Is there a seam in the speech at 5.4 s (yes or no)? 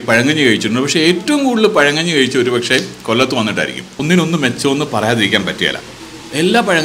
no